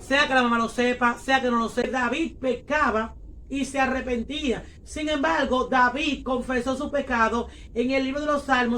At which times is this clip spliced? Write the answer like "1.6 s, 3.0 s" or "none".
1.8 s